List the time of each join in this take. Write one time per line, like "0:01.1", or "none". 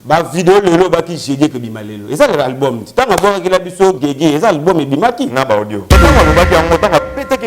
0:06.0